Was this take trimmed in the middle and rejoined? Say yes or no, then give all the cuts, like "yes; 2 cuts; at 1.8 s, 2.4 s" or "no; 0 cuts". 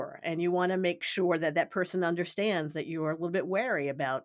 yes; 1 cut; at 1.1 s